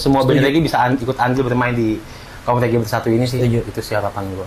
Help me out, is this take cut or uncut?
uncut